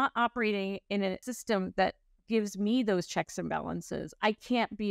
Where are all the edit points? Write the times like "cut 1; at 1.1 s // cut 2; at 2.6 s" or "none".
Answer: cut 1; at 1.2 s